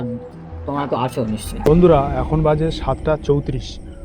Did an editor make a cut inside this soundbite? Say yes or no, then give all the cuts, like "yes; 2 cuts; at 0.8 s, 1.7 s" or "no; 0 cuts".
yes; 1 cut; at 1.6 s